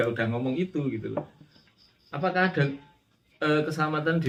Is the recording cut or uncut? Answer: uncut